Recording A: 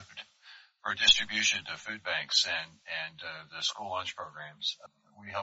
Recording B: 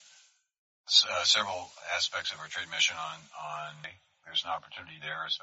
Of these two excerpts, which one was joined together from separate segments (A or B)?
B